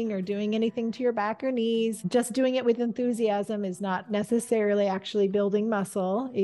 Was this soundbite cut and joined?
yes; 1 cut; at 2.0 s

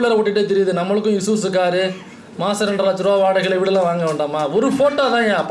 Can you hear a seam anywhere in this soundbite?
no; 0 cuts

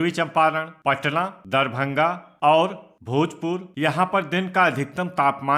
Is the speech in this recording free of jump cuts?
no; 2 cuts; at 1.4 s, 3.3 s

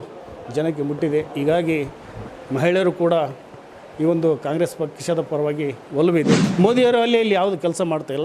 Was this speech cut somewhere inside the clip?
yes; 1 cut; at 6.5 s

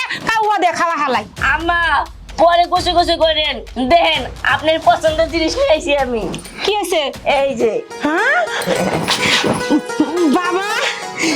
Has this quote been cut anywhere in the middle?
no; 0 cuts

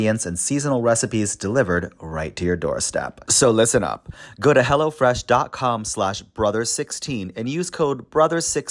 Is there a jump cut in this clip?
yes; 1 cut; at 3.2 s

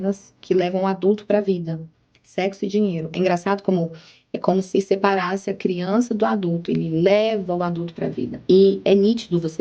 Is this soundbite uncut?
no; 1 cut; at 8.3 s

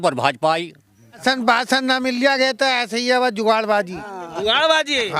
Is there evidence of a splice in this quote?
yes; 1 cut; at 1.2 s

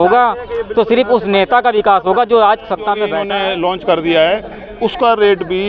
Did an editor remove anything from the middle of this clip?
yes; 1 cut; at 3.2 s

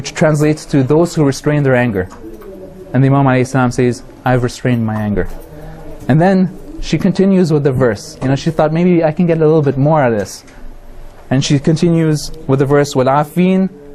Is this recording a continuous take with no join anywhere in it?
no; 1 cut; at 1.4 s

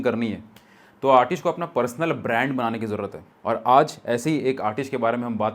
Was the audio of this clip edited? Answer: no; 0 cuts

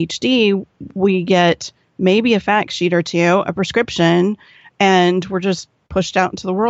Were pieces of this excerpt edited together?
no; 0 cuts

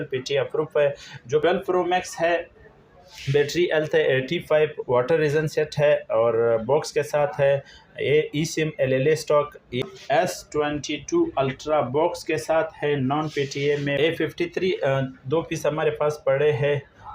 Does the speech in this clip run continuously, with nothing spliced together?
no; 3 cuts; at 1.4 s, 9.7 s, 14.0 s

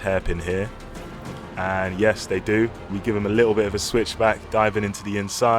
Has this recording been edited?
yes; 1 cut; at 2.9 s

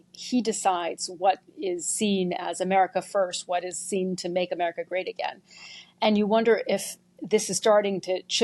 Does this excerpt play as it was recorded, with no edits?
yes; 0 cuts

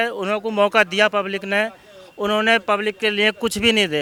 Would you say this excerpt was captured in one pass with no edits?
yes; 0 cuts

